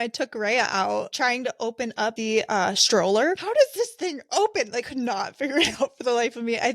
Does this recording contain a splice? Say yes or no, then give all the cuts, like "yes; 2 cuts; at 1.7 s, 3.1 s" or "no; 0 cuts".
yes; 4 cuts; at 1.1 s, 2.2 s, 3.4 s, 4.9 s